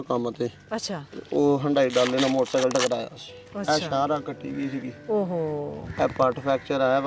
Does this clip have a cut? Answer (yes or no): no